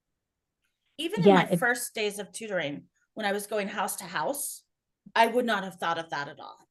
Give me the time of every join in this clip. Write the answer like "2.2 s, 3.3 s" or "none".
none